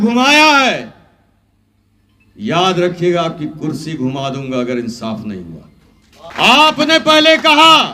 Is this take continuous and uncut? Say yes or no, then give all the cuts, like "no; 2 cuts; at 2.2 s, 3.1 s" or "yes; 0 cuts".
no; 1 cut; at 6.3 s